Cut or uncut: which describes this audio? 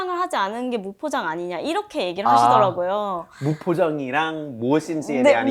uncut